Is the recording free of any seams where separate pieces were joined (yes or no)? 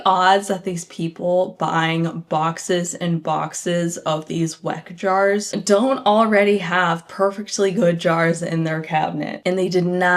yes